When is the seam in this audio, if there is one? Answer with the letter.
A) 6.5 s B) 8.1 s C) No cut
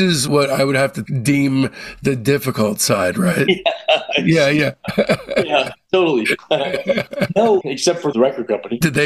B